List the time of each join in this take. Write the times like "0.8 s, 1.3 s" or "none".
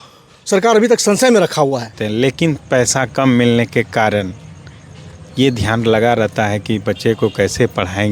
2.0 s